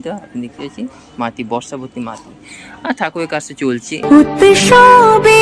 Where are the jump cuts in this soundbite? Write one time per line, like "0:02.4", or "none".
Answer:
0:04.0